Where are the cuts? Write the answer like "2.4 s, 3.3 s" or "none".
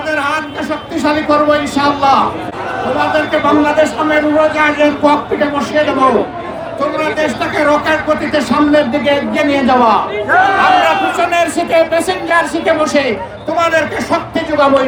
none